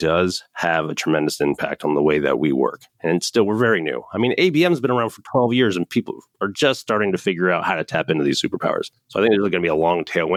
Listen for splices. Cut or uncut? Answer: uncut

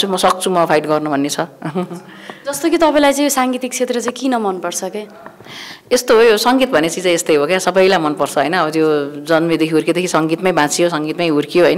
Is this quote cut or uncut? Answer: uncut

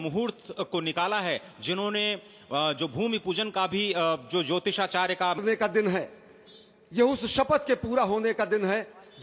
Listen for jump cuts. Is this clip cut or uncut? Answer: cut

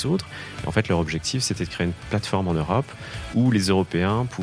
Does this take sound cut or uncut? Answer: uncut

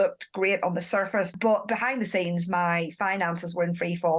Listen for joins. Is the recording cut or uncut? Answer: cut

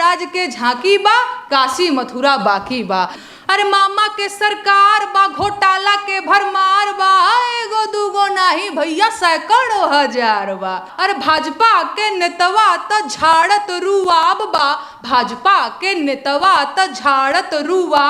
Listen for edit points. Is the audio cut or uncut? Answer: cut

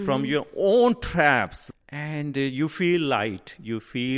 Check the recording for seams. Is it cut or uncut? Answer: cut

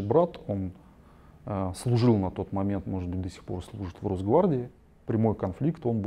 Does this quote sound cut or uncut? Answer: cut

